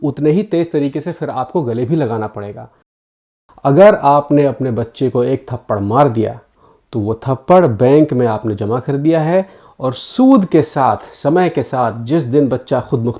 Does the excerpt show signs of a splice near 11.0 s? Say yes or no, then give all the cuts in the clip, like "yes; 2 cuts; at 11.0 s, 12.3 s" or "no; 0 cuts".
no; 1 cut; at 3.2 s